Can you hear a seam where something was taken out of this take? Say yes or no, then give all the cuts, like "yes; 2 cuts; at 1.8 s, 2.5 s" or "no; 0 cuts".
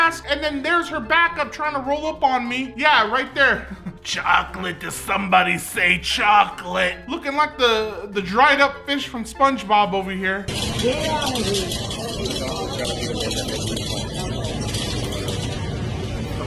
no; 0 cuts